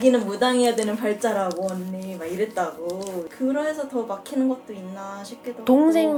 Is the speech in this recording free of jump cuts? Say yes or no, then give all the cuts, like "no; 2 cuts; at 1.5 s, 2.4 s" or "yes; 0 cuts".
yes; 0 cuts